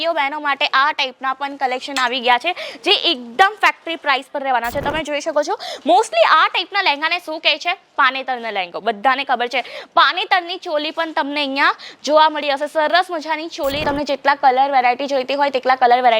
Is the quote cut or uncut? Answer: cut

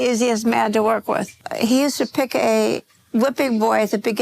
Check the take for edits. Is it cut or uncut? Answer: cut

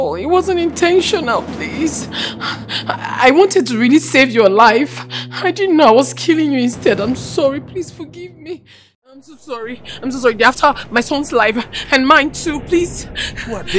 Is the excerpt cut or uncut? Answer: cut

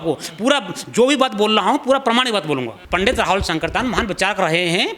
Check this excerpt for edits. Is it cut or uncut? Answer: cut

